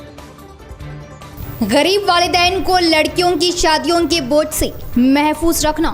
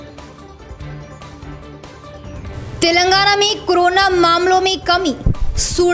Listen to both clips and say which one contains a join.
first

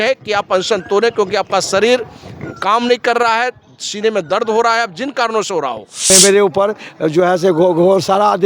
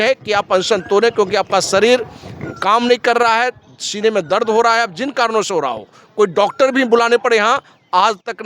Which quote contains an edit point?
first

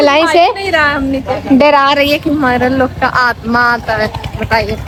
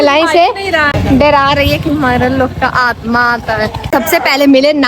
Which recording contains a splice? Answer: second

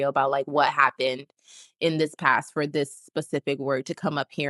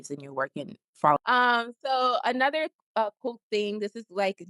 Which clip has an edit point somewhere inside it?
second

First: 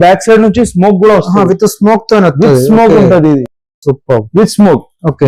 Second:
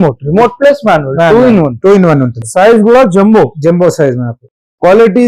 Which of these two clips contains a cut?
second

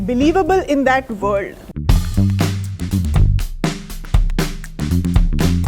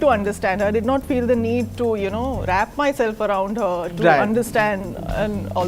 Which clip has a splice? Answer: first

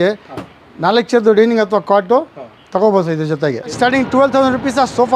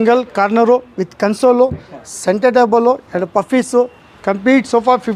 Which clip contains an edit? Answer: first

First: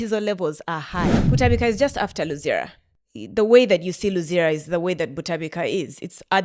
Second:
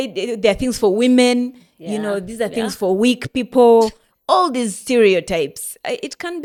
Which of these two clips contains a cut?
first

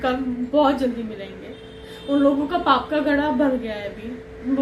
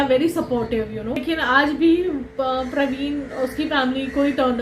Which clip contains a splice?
second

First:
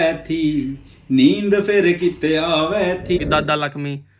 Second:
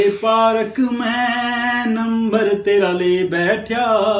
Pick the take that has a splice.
first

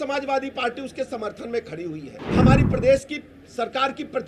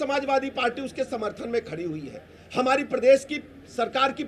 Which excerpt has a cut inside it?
first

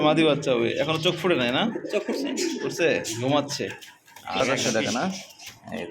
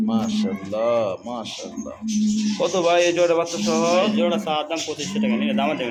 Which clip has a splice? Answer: first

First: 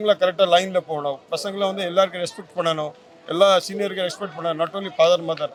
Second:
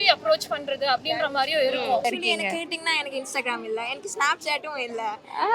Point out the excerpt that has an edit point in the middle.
second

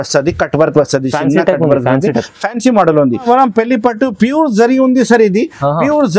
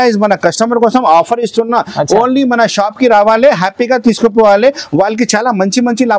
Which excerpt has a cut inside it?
first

